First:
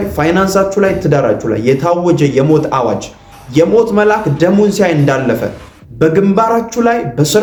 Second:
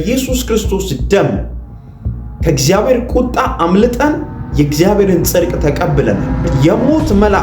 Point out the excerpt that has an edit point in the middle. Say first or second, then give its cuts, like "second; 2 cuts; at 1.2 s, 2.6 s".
second; 1 cut; at 6.5 s